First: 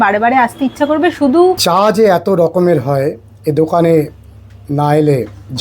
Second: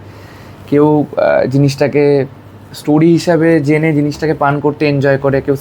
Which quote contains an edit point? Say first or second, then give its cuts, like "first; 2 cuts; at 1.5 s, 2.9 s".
first; 1 cut; at 1.6 s